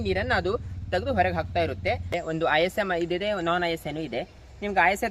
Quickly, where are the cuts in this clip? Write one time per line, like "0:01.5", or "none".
0:02.1

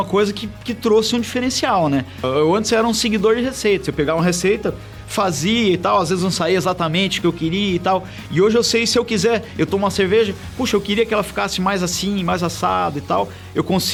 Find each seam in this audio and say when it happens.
none

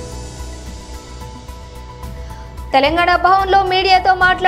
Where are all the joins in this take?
0:01.0

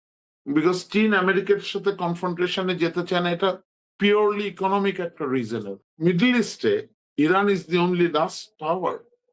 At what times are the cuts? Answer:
0:05.8
0:07.0

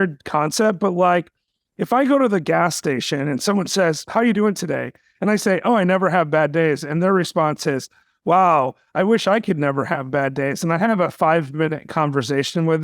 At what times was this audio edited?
0:04.0

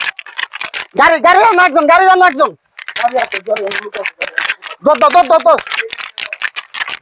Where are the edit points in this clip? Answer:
none

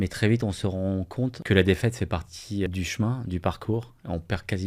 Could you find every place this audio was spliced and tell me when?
0:01.4
0:02.7

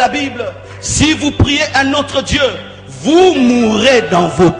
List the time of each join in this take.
none

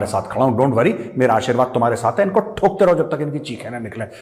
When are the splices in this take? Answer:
none

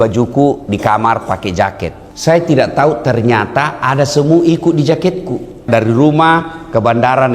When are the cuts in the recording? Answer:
0:02.1
0:05.7

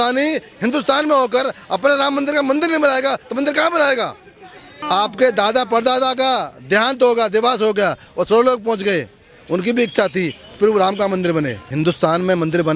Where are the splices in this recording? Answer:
0:04.7
0:11.6

